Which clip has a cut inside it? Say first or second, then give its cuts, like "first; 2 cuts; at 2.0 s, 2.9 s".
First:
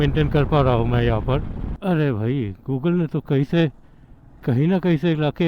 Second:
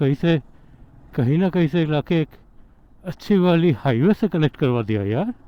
first; 1 cut; at 1.7 s